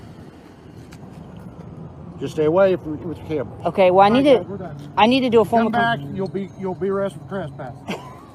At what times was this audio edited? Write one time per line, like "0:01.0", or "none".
none